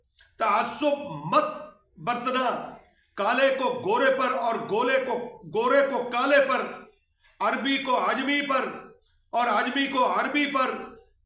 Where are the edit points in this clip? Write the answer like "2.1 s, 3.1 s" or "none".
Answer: none